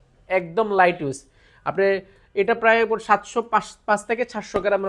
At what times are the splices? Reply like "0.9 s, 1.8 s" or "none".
none